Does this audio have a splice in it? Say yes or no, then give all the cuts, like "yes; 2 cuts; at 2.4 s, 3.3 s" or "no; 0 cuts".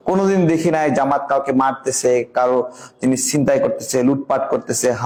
no; 0 cuts